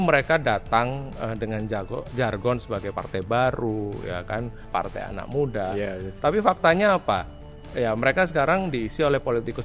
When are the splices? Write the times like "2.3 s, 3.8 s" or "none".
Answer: 4.6 s